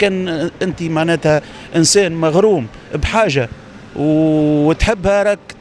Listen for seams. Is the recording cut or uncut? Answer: uncut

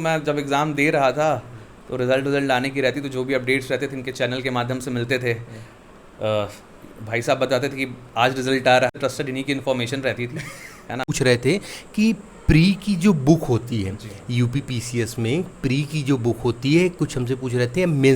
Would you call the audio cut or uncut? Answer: cut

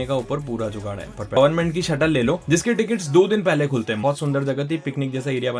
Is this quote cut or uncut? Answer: cut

